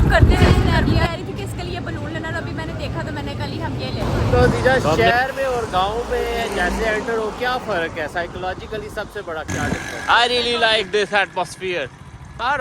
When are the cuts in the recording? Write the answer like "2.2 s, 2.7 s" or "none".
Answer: 1.1 s, 4.0 s, 9.5 s